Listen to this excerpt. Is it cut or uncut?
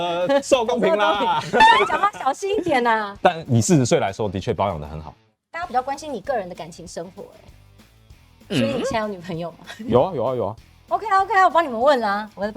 uncut